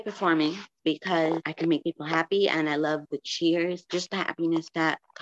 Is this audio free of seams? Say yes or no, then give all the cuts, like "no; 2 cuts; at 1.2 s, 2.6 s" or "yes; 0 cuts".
yes; 0 cuts